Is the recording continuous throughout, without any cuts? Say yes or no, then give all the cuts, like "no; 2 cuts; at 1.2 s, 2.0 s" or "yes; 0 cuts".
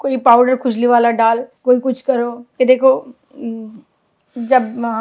no; 1 cut; at 1.5 s